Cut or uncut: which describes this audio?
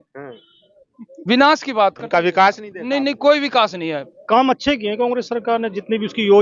cut